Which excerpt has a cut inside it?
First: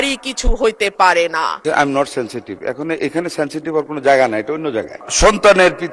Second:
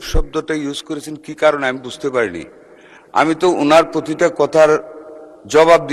first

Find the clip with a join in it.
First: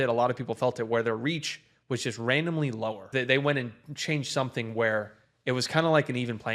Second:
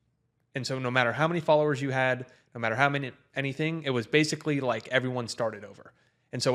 first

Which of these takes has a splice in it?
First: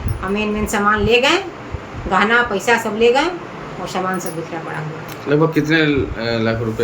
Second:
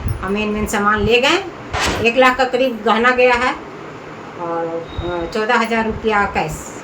second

